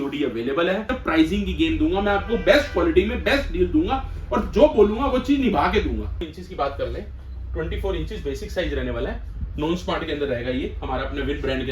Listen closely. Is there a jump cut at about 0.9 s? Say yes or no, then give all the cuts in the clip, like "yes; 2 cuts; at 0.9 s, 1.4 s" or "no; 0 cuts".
yes; 2 cuts; at 0.9 s, 6.2 s